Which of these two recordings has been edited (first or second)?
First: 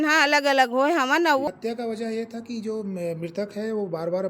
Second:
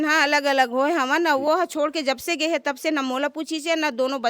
first